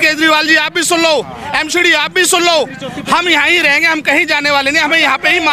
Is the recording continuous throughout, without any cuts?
yes; 0 cuts

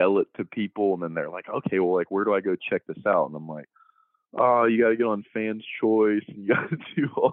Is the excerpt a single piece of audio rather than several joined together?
yes; 0 cuts

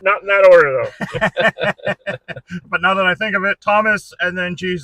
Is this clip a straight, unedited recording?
yes; 0 cuts

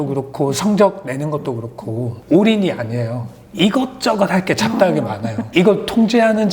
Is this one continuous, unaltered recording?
no; 2 cuts; at 2.1 s, 5.3 s

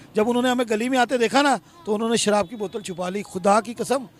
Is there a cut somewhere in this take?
no; 0 cuts

